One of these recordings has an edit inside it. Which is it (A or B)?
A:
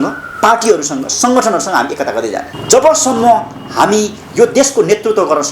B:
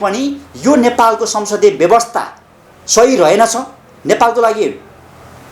A